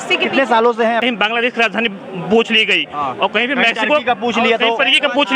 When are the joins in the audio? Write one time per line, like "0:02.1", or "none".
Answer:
0:01.0